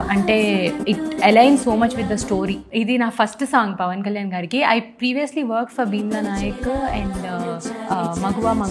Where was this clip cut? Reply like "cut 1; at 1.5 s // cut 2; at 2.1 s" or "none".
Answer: cut 1; at 2.6 s // cut 2; at 7.7 s